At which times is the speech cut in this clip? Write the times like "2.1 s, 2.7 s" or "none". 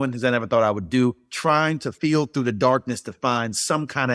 1.6 s